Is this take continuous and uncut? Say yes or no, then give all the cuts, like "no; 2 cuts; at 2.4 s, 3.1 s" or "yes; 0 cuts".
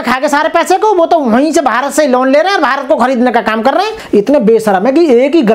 no; 1 cut; at 4.0 s